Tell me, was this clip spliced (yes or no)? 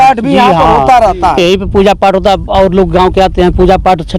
no